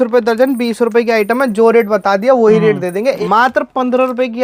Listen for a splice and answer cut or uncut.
cut